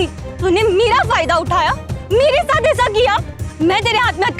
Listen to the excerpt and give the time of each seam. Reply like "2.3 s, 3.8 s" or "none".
3.5 s